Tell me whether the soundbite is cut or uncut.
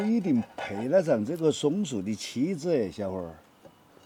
uncut